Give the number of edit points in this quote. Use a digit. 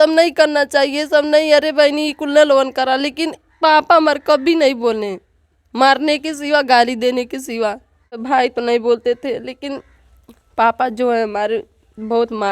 1